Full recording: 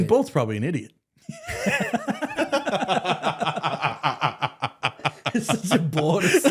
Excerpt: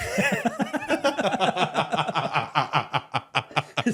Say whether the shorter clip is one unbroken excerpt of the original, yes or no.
yes